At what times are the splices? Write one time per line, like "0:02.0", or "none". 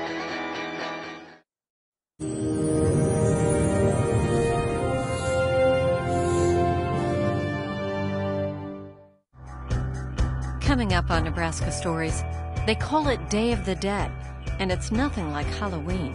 none